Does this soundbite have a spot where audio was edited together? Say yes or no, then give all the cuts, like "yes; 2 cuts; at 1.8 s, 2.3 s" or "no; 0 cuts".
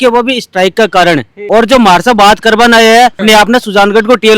yes; 2 cuts; at 1.3 s, 3.2 s